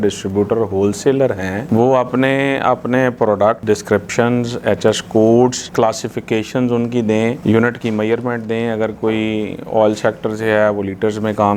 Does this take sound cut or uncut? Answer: uncut